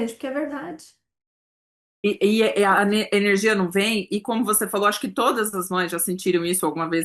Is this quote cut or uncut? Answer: uncut